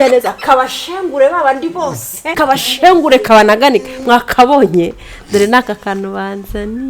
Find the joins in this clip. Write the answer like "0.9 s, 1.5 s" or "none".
2.4 s